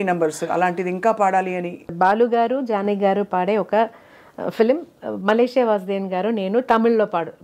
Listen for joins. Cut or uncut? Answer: cut